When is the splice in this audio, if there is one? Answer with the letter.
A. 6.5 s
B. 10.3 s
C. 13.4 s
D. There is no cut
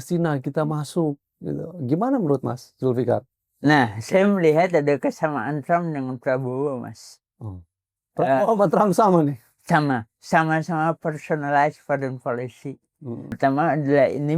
C